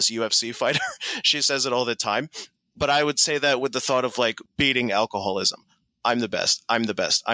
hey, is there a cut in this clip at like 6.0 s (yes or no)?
no